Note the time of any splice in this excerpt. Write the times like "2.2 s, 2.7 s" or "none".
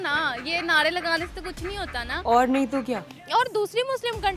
2.1 s, 3.1 s